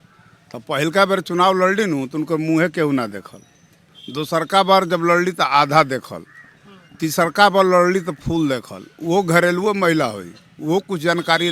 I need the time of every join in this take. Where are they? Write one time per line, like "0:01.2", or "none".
none